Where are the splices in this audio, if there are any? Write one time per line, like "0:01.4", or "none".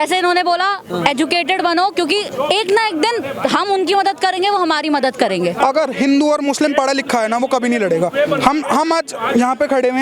0:05.6